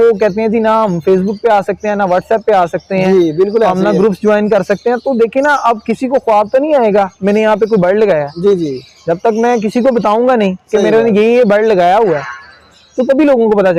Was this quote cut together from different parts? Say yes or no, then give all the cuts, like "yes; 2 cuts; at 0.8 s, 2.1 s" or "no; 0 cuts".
no; 0 cuts